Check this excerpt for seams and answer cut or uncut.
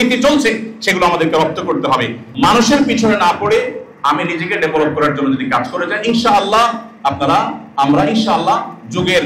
cut